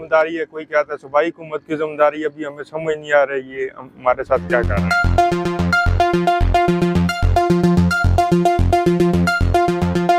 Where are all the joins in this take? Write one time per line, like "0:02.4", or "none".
none